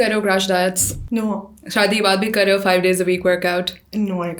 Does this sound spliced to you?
yes; 1 cut; at 0.9 s

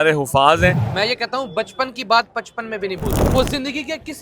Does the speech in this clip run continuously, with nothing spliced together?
no; 2 cuts; at 0.8 s, 3.1 s

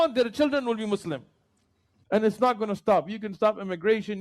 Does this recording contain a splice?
yes; 1 cut; at 2.0 s

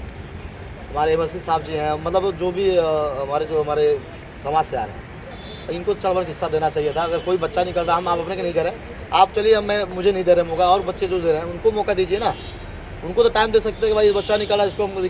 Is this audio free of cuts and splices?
yes; 0 cuts

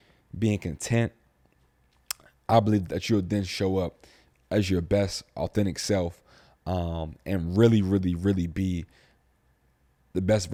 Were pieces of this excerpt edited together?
no; 0 cuts

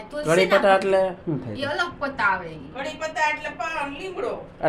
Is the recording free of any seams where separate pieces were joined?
yes; 0 cuts

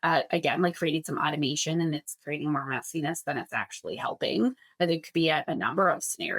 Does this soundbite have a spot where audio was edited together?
no; 0 cuts

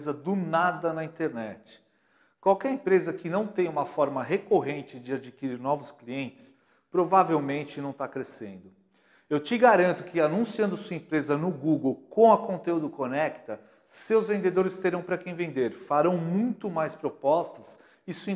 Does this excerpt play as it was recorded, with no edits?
yes; 0 cuts

